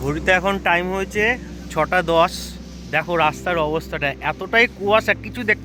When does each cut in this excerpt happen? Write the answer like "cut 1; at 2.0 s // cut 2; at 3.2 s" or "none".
none

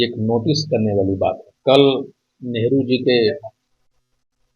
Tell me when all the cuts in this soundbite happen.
cut 1; at 1.5 s // cut 2; at 3.3 s

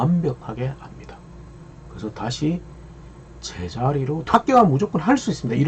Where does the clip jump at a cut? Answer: cut 1; at 4.3 s

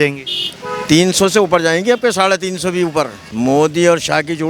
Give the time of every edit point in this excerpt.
cut 1; at 3.2 s

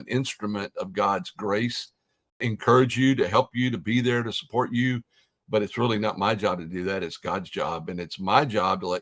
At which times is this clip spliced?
cut 1; at 2.4 s

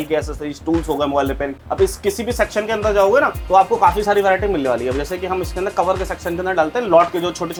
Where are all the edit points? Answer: none

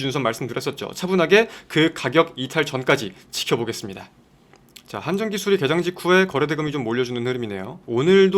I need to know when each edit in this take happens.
cut 1; at 4.5 s

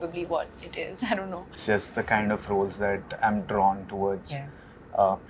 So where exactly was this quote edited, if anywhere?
cut 1; at 1.5 s

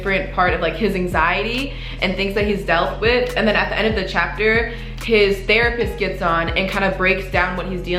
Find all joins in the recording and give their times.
none

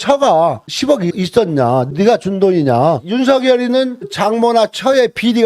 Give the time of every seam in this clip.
cut 1; at 3.0 s // cut 2; at 4.1 s

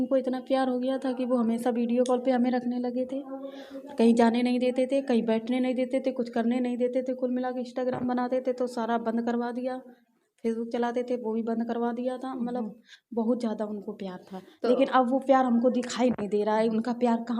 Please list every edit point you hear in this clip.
none

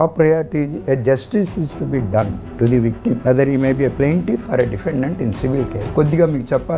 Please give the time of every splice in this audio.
cut 1; at 3.2 s // cut 2; at 5.8 s

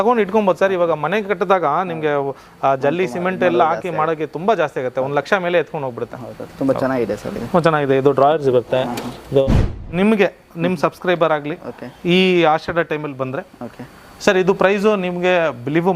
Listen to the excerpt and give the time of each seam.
cut 1; at 9.6 s

